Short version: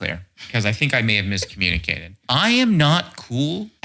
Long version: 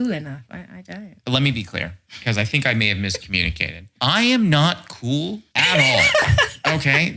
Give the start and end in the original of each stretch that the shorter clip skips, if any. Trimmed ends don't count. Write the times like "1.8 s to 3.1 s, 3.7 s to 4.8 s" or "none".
none